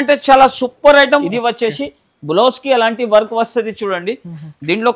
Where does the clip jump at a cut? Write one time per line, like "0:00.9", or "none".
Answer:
0:01.2